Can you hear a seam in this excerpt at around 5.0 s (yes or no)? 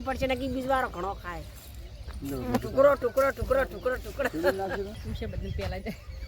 yes